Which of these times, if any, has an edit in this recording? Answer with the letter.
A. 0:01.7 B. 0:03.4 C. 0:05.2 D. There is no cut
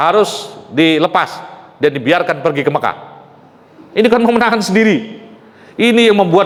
D